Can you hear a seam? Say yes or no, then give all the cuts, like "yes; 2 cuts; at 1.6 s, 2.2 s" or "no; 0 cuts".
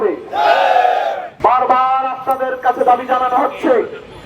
yes; 1 cut; at 1.2 s